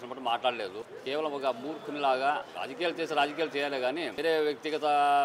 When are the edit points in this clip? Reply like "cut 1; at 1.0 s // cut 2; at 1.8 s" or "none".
cut 1; at 0.9 s // cut 2; at 2.5 s // cut 3; at 4.1 s

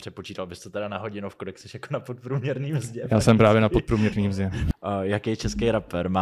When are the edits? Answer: cut 1; at 4.6 s

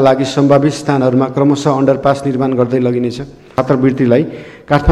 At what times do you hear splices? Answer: cut 1; at 3.5 s

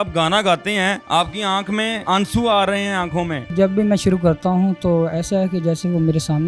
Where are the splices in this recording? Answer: cut 1; at 1.0 s // cut 2; at 2.0 s // cut 3; at 3.5 s

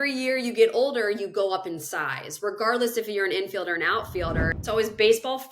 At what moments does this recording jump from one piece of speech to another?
cut 1; at 4.4 s

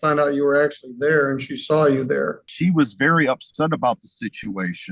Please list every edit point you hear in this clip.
cut 1; at 2.4 s

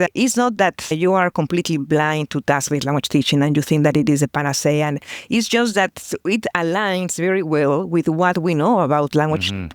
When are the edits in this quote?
none

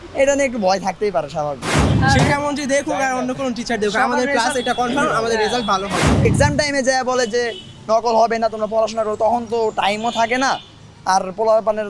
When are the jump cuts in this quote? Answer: cut 1; at 1.9 s // cut 2; at 6.2 s

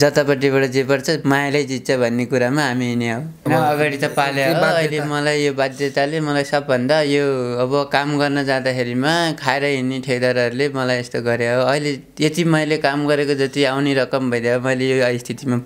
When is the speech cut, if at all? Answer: cut 1; at 3.5 s

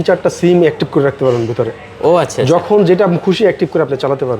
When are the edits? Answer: none

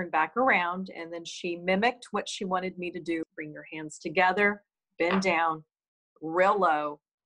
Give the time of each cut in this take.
cut 1; at 3.3 s

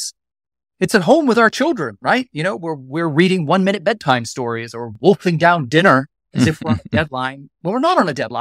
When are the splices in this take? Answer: cut 1; at 6.2 s // cut 2; at 7.4 s

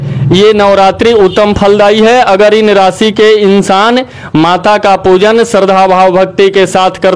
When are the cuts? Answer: none

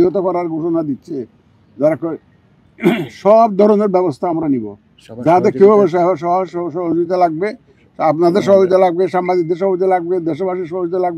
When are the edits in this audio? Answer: none

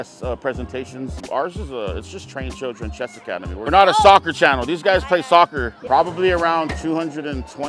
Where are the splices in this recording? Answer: cut 1; at 1.2 s // cut 2; at 3.7 s // cut 3; at 5.7 s

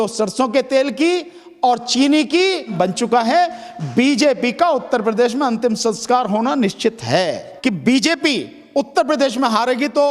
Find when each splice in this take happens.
cut 1; at 2.7 s // cut 2; at 7.5 s

